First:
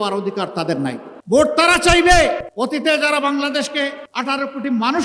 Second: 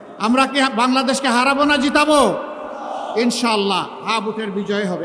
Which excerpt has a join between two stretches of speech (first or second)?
first